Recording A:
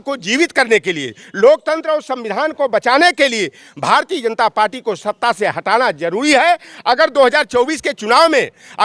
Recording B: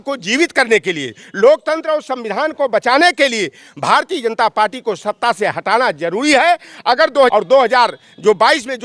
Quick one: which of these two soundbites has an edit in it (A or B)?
B